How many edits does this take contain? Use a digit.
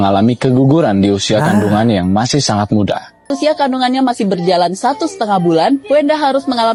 0